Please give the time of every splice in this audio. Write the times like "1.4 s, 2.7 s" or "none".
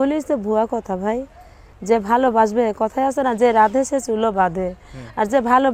none